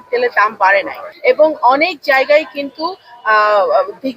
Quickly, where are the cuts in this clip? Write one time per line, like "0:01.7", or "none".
0:01.0